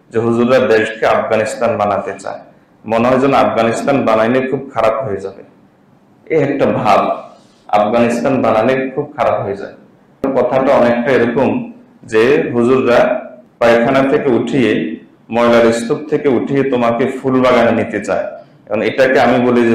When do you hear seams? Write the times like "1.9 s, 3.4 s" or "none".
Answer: 10.2 s